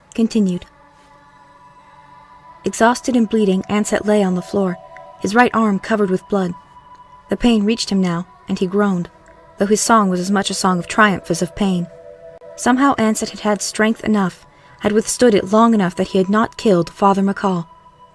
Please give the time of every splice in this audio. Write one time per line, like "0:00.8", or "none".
0:12.8